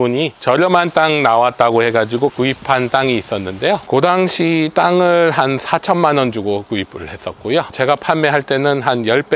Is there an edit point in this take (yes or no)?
yes